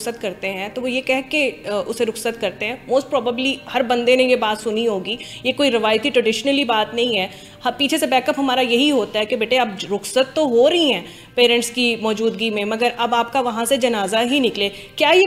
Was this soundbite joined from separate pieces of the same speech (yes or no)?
no